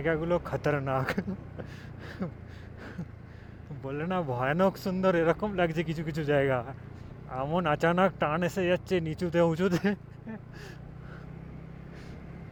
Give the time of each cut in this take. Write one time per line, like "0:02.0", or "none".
none